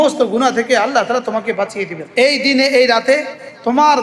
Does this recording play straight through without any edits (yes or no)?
no